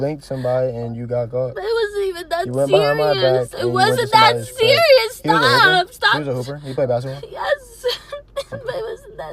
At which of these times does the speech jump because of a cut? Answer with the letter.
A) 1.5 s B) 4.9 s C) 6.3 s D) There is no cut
A